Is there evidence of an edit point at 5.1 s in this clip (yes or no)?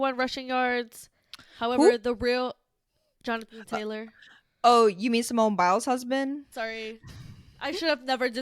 no